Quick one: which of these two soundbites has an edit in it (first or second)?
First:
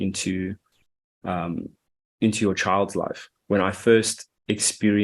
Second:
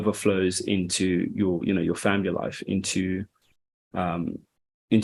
first